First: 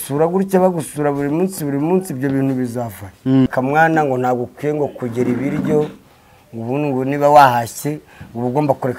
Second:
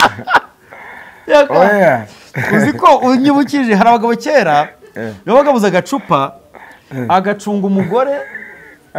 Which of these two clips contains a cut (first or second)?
first